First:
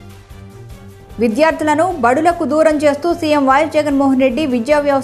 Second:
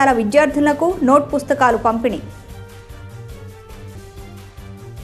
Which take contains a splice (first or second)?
first